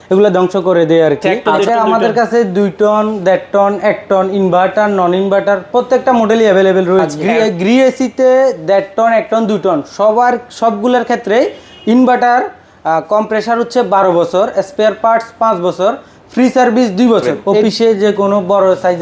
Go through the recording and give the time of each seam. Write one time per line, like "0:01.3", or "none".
0:01.5
0:07.2
0:17.5